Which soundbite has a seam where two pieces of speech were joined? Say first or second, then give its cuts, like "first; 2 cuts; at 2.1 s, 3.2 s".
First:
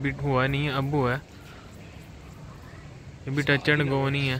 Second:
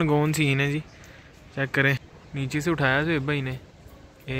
second; 1 cut; at 2.2 s